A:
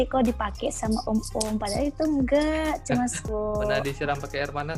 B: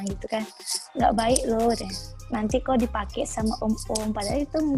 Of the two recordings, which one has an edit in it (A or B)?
A